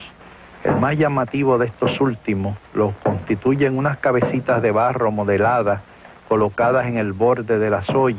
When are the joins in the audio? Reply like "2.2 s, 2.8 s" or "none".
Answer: none

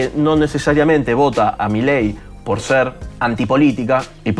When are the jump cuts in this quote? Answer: 1.5 s

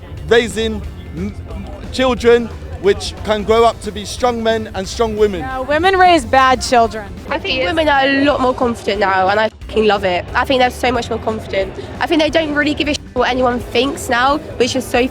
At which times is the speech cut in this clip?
7.4 s

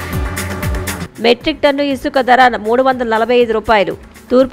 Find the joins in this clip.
1.0 s

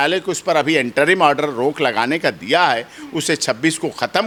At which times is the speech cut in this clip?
none

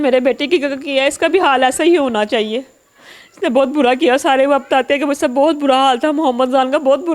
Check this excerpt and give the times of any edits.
none

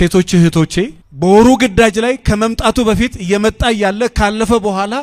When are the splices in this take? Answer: 1.0 s

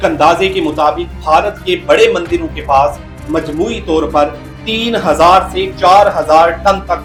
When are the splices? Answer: none

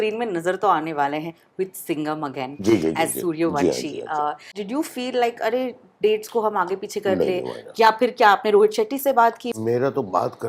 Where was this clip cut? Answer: 4.5 s, 9.5 s

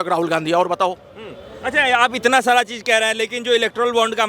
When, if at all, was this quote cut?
none

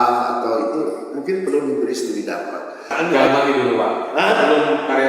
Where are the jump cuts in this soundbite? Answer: 2.9 s

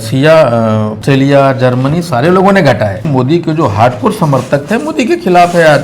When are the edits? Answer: 1.0 s, 3.0 s

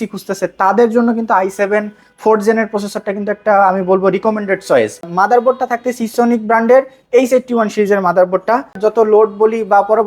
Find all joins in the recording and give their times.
5.1 s, 8.8 s

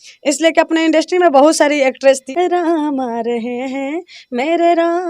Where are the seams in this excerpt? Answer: 2.2 s

